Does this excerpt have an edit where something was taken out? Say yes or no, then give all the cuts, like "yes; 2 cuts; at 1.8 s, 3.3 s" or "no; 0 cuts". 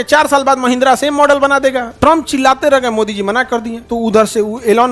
yes; 2 cuts; at 1.9 s, 3.8 s